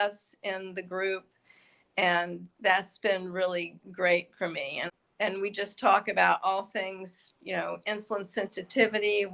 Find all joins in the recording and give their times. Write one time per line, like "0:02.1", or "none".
0:04.8

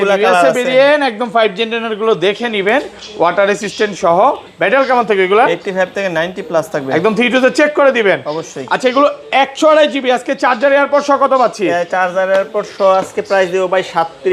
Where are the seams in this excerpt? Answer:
none

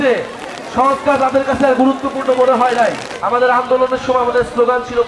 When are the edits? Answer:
0:03.1

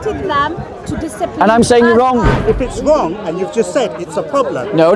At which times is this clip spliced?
0:02.3

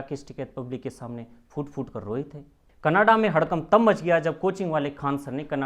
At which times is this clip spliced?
none

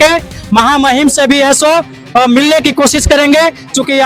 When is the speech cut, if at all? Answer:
none

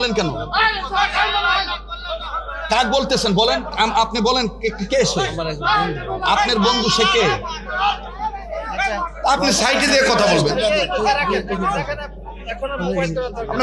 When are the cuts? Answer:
none

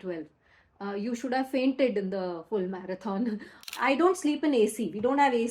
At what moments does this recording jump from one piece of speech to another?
0:03.7

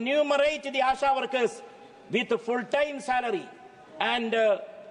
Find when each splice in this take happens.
none

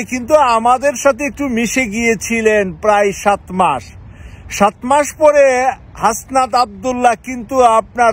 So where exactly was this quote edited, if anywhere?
none

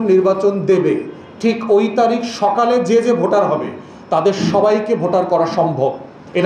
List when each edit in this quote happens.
none

